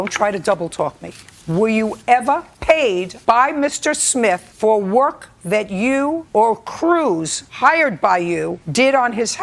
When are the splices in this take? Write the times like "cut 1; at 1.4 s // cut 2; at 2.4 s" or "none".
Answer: none